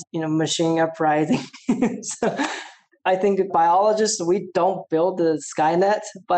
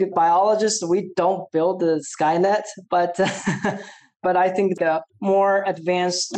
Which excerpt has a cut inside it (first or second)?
second